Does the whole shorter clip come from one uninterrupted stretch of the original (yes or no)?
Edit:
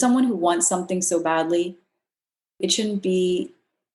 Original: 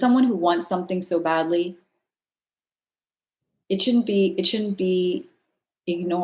no